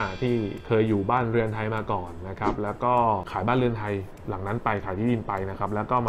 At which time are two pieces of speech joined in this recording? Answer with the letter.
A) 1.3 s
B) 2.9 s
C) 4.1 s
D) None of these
D